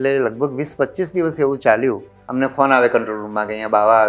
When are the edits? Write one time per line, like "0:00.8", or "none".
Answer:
0:02.2